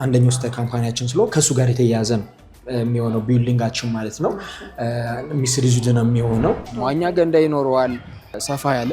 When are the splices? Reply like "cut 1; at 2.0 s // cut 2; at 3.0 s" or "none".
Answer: cut 1; at 6.7 s